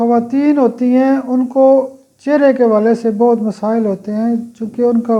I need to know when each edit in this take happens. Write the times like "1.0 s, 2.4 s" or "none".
none